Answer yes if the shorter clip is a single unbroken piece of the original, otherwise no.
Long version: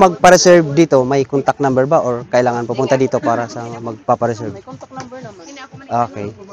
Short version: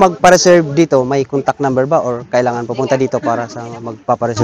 yes